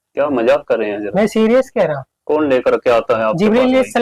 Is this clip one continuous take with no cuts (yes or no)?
no